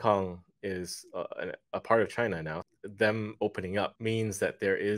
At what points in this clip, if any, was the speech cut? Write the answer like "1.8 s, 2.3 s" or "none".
2.6 s, 4.0 s